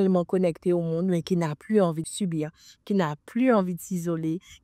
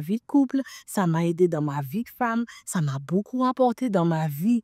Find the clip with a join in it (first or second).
first